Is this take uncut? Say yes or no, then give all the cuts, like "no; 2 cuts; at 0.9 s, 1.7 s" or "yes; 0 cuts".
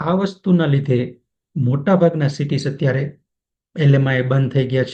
yes; 0 cuts